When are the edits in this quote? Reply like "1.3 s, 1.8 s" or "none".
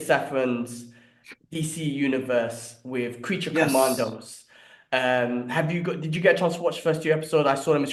none